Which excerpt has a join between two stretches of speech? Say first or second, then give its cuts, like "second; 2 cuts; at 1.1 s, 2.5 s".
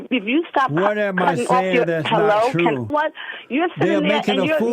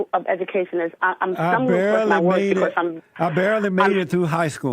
first; 1 cut; at 2.9 s